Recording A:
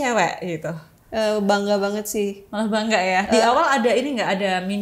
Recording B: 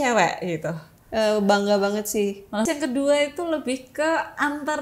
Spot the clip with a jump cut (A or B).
B